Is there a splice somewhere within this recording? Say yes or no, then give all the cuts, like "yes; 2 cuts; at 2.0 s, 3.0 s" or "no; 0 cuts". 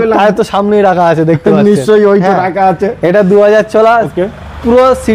no; 0 cuts